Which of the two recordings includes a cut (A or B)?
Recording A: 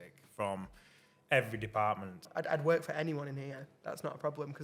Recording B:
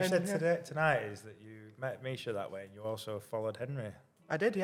A